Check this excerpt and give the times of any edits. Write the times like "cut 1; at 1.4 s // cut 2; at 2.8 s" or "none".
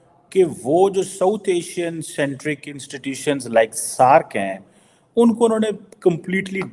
none

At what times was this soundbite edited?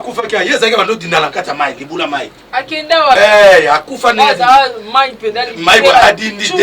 cut 1; at 3.2 s

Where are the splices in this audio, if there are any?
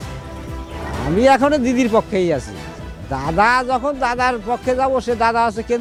none

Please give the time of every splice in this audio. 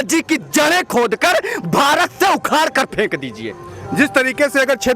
none

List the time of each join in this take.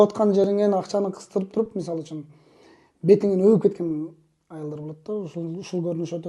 none

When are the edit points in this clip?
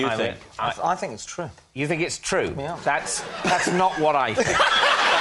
none

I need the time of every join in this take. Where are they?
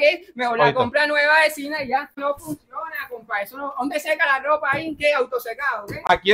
none

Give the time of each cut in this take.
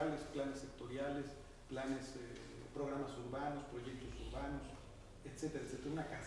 none

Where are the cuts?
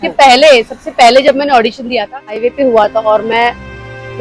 cut 1; at 2.4 s

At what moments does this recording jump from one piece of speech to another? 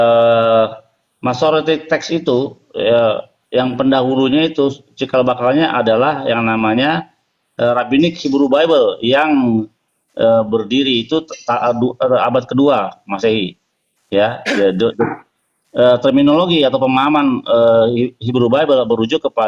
none

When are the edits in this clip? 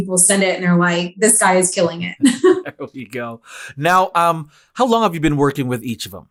none

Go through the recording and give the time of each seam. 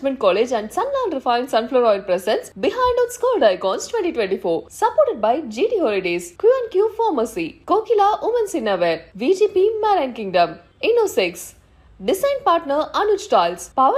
none

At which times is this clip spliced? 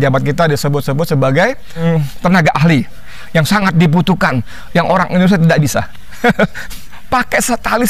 cut 1; at 1.8 s

